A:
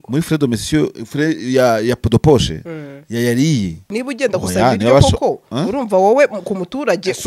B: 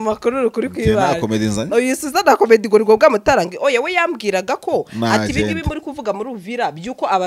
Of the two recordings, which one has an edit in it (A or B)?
A